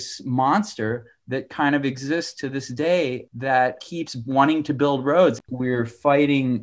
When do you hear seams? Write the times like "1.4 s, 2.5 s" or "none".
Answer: 3.4 s, 5.4 s